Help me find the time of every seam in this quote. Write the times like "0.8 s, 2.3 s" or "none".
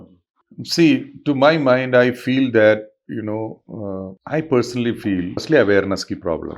4.2 s, 5.4 s